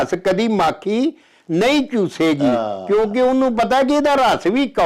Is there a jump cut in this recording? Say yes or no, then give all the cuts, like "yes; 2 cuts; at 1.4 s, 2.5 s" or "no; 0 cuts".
no; 0 cuts